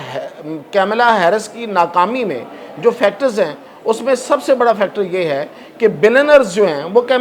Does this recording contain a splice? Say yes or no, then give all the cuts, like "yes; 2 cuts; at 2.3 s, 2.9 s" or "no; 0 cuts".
no; 0 cuts